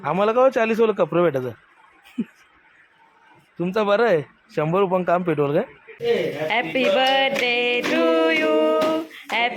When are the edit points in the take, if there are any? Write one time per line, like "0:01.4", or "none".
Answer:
0:05.8